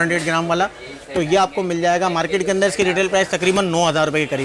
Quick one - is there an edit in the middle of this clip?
no; 0 cuts

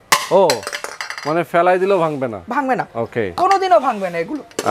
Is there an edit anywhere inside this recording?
no; 0 cuts

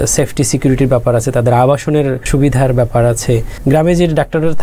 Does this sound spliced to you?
yes; 2 cuts; at 2.2 s, 3.5 s

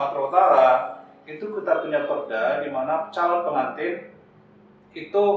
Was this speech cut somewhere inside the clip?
no; 0 cuts

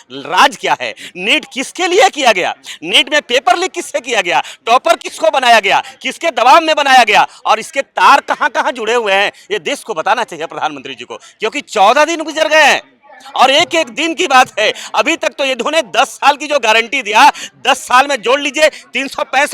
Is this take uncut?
yes; 0 cuts

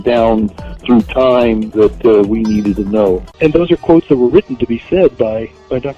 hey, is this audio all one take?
no; 1 cut; at 3.3 s

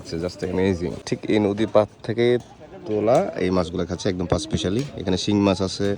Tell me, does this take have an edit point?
yes; 1 cut; at 1.1 s

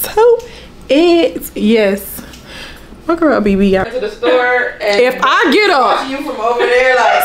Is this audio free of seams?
no; 1 cut; at 3.9 s

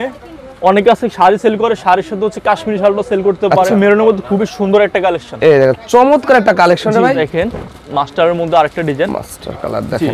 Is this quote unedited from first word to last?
no; 2 cuts; at 3.7 s, 7.3 s

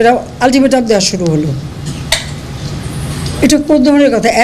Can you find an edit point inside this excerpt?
no; 0 cuts

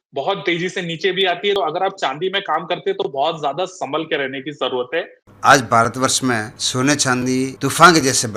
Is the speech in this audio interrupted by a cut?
yes; 4 cuts; at 1.6 s, 5.2 s, 6.6 s, 7.5 s

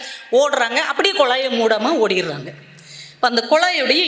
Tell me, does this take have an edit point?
no; 0 cuts

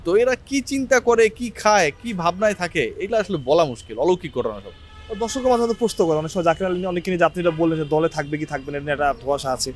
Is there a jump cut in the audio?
no; 0 cuts

